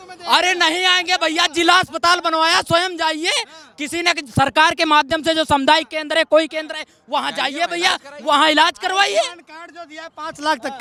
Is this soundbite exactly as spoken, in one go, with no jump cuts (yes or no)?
yes